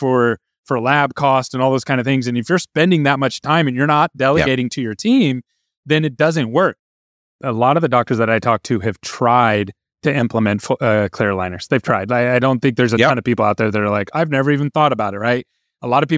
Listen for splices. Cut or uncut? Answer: cut